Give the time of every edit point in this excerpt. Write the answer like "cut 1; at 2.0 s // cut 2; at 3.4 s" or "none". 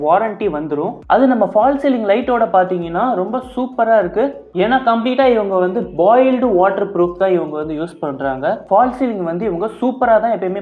cut 1; at 1.0 s // cut 2; at 4.5 s // cut 3; at 8.6 s